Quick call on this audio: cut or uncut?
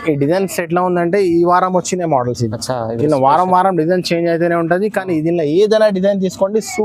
uncut